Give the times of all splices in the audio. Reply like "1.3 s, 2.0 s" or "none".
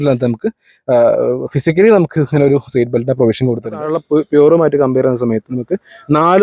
3.7 s

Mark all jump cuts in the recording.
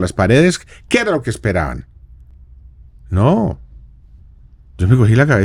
none

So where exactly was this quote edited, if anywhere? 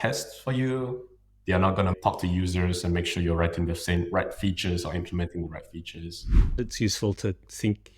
1.9 s, 6.6 s

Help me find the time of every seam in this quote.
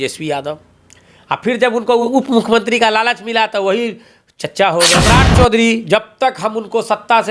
2.1 s, 5.1 s

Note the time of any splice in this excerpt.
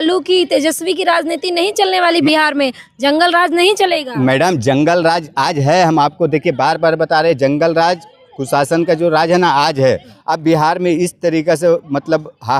10.1 s

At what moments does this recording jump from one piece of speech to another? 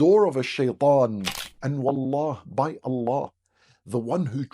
1.4 s

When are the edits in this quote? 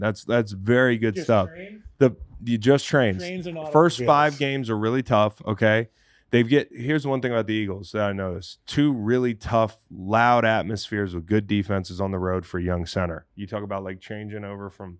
none

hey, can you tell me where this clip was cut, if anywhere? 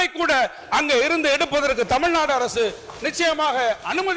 none

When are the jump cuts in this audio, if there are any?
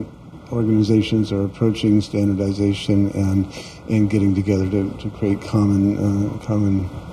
none

